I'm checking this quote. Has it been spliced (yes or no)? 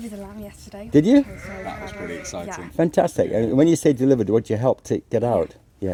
no